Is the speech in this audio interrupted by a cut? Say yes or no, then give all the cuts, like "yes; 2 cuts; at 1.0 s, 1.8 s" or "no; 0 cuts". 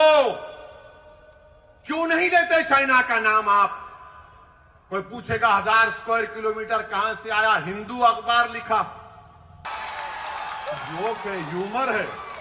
yes; 1 cut; at 9.7 s